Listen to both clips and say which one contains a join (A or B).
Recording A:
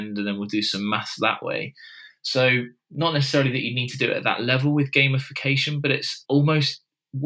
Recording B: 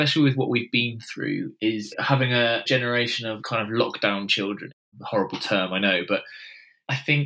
B